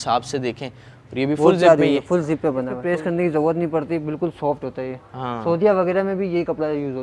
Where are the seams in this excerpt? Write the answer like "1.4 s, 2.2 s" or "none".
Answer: 2.8 s